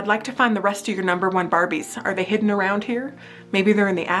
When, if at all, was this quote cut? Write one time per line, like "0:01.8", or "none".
none